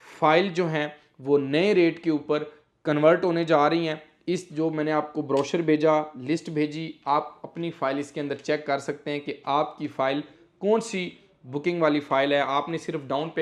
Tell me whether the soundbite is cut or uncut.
uncut